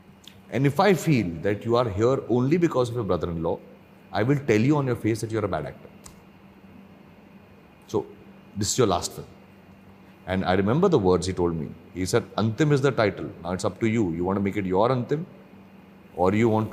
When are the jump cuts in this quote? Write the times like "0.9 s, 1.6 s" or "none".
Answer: none